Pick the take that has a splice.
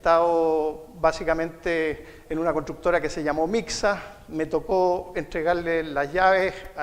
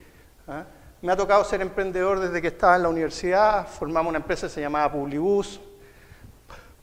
first; 1 cut; at 4.3 s

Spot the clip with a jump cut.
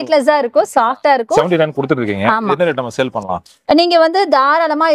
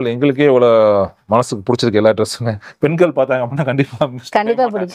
first; 1 cut; at 1.4 s

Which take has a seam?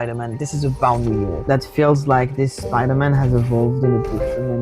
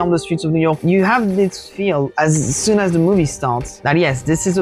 first; 1 cut; at 1.4 s

